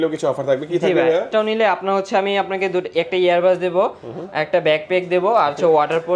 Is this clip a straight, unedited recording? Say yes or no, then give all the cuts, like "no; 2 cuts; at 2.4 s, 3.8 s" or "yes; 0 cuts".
no; 1 cut; at 1.3 s